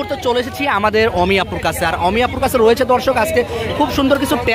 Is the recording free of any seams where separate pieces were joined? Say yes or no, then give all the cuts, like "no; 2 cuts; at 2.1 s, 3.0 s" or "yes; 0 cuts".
yes; 0 cuts